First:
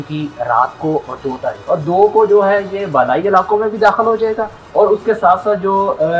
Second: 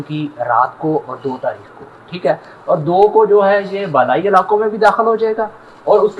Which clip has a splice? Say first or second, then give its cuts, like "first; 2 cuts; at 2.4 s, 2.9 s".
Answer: first; 2 cuts; at 1.6 s, 4.5 s